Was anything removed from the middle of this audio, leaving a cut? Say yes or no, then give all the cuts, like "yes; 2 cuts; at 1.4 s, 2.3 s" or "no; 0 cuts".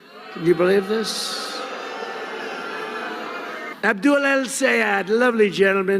yes; 1 cut; at 3.7 s